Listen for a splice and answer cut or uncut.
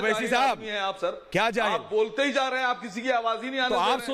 uncut